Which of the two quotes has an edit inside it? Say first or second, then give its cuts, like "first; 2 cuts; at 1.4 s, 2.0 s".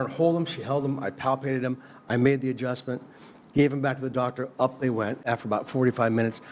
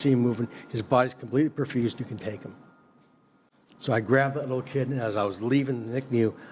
first; 1 cut; at 5.3 s